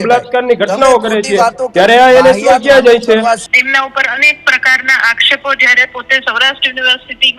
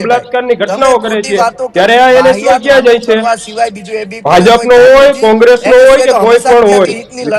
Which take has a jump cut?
first; 1 cut; at 3.5 s

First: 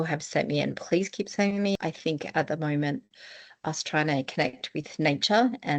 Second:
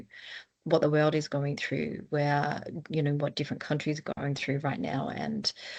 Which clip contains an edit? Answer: first; 1 cut; at 1.8 s

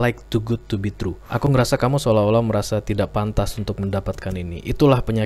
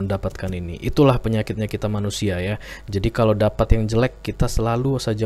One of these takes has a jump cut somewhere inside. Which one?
first; 1 cut; at 1.2 s

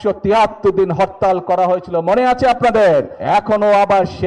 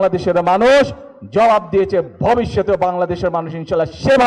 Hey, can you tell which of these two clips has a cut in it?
first; 1 cut; at 3.1 s

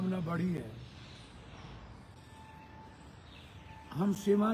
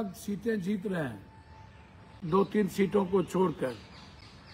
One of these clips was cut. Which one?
first; 1 cut; at 2.1 s

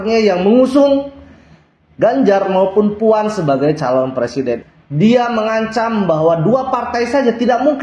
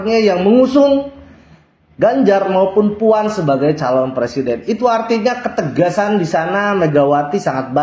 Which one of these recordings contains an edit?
first; 1 cut; at 4.6 s

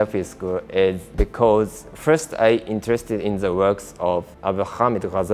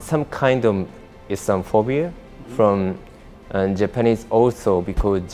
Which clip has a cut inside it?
first; 2 cuts; at 1.1 s, 4.3 s

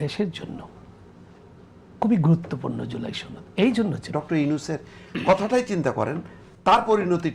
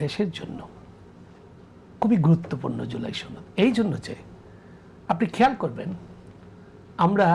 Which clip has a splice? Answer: first; 1 cut; at 4.1 s

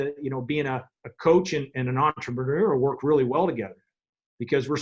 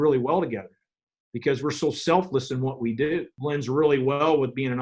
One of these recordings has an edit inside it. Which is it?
second; 1 cut; at 3.3 s

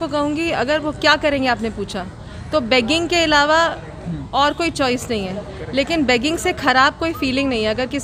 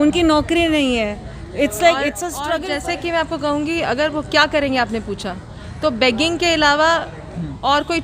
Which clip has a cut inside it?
second; 1 cut; at 2.4 s

